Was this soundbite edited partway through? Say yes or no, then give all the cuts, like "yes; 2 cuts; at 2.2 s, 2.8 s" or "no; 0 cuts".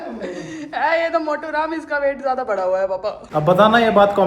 yes; 1 cut; at 3.2 s